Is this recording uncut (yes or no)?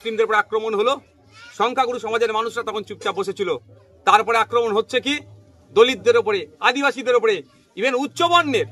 yes